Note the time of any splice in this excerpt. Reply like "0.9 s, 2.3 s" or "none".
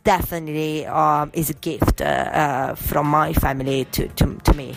none